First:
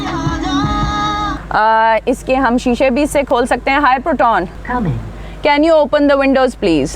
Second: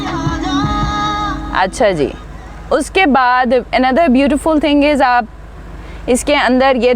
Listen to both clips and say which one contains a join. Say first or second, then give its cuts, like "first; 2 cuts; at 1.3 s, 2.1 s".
first; 2 cuts; at 1.3 s, 4.6 s